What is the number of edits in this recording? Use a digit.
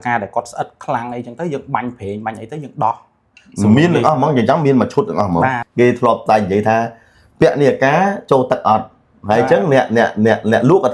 1